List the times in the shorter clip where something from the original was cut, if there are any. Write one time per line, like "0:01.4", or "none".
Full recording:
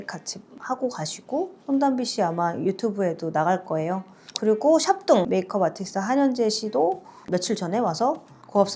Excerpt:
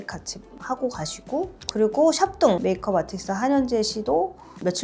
0:01.6